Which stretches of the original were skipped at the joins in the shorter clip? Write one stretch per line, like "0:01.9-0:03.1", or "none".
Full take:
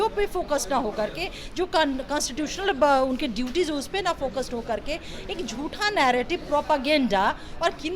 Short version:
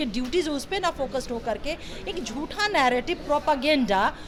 none